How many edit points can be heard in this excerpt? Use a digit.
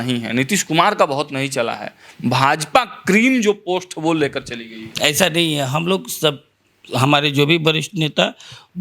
0